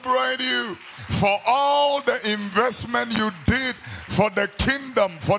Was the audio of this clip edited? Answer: no; 0 cuts

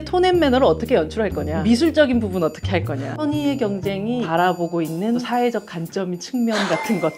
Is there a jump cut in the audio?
yes; 4 cuts; at 1.5 s, 3.0 s, 4.3 s, 5.2 s

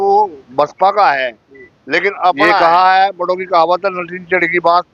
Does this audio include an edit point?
yes; 1 cut; at 2.6 s

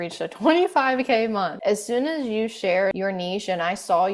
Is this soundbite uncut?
no; 2 cuts; at 1.5 s, 3.0 s

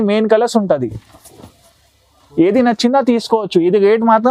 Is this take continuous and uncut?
yes; 0 cuts

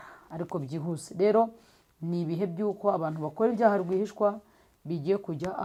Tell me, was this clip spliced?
no; 0 cuts

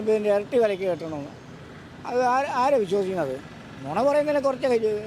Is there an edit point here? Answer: no; 0 cuts

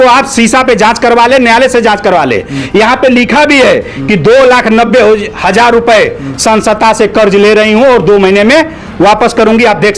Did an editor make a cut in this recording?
no; 0 cuts

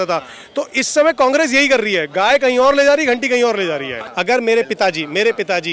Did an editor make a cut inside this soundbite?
yes; 1 cut; at 4.0 s

